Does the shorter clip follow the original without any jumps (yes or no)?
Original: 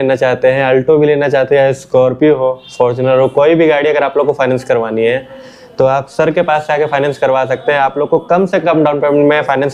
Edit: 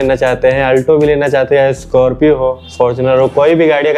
yes